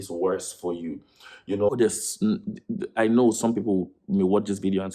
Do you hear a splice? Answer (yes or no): yes